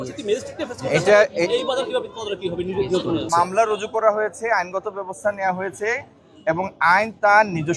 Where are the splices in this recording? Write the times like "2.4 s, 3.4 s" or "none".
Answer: 3.3 s